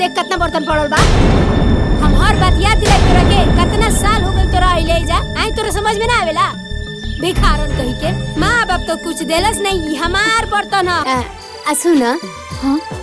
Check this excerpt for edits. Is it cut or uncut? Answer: cut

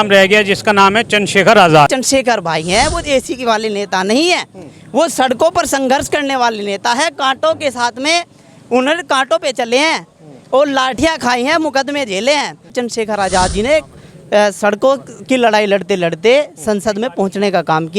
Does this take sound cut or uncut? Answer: cut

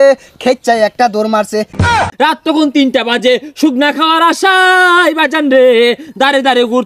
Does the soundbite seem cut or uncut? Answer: cut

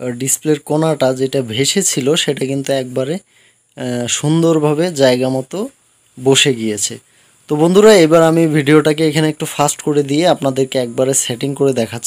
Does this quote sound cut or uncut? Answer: uncut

